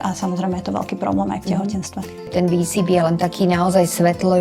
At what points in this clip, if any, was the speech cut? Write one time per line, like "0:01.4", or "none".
0:02.3